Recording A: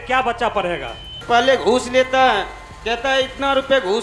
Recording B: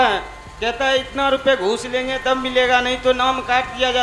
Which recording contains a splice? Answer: A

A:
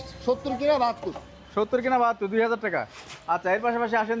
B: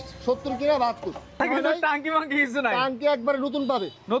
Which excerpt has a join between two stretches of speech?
B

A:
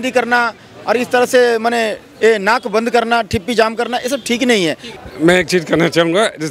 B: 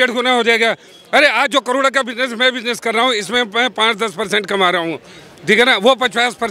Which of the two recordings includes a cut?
A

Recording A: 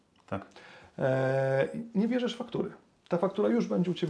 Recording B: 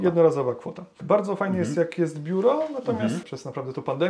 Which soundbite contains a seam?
B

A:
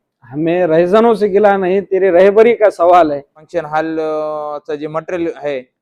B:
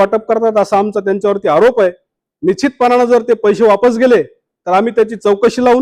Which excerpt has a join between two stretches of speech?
A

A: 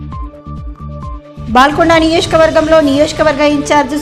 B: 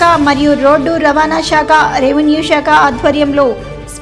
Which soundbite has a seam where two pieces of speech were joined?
A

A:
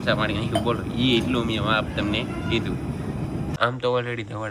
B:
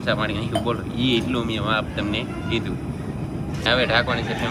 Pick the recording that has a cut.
A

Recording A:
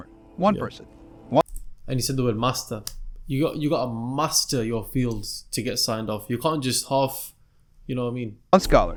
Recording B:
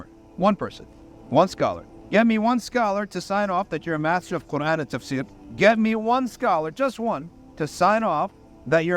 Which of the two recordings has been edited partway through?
B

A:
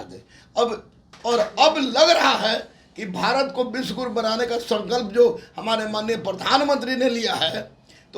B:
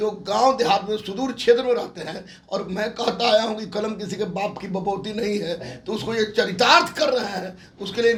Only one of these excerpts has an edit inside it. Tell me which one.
A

